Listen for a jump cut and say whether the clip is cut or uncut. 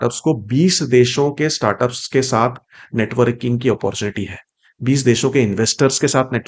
uncut